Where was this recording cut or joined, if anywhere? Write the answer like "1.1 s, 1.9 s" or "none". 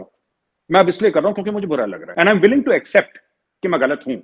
2.0 s